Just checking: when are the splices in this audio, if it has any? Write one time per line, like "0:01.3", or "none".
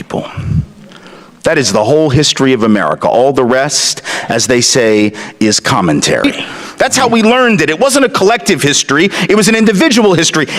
0:06.2